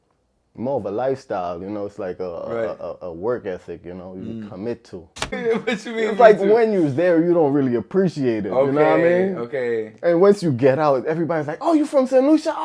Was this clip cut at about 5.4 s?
yes; 1 cut; at 5.4 s

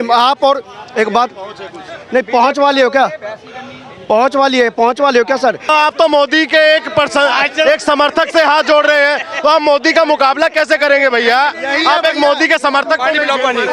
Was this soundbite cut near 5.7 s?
yes; 1 cut; at 5.7 s

